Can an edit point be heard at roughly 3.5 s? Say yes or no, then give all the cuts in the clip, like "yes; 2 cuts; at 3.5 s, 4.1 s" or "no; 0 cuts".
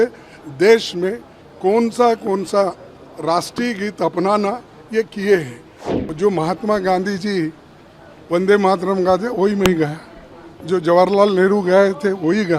no; 1 cut; at 6.0 s